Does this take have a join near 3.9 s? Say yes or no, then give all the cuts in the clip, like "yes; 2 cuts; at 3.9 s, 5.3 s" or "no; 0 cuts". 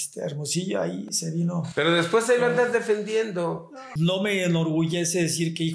yes; 1 cut; at 3.9 s